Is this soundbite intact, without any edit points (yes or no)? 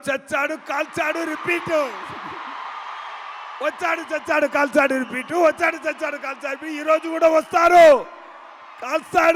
yes